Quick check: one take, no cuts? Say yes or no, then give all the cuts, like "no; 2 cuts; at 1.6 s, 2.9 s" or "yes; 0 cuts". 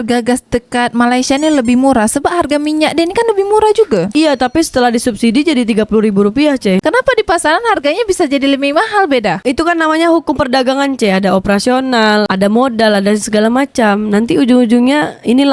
no; 1 cut; at 4.1 s